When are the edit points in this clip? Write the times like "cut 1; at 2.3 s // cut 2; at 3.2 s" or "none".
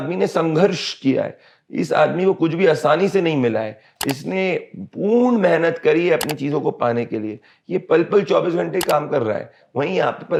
none